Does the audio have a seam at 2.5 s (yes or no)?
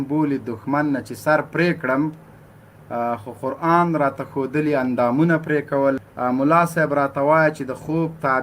no